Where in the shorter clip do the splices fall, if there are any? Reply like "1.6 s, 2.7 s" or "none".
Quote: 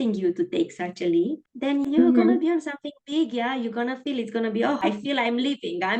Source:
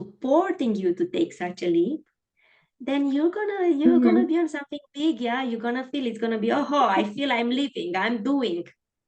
1.9 s, 4.8 s